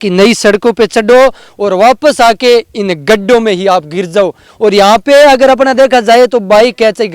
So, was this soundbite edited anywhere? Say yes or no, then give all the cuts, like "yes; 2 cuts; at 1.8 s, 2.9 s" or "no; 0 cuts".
no; 0 cuts